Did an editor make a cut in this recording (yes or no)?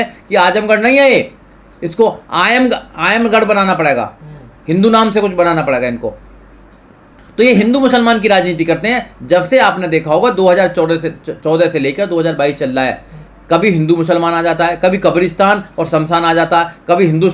no